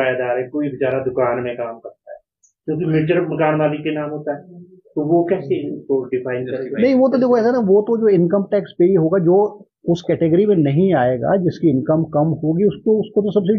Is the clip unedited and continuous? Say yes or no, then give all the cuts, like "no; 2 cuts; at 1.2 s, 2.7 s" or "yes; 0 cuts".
yes; 0 cuts